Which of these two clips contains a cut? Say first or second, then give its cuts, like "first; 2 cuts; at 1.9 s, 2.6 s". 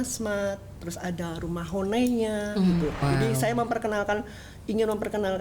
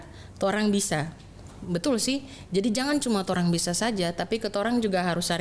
first; 1 cut; at 3.0 s